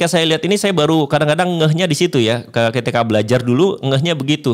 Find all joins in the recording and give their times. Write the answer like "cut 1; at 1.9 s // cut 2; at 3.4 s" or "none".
none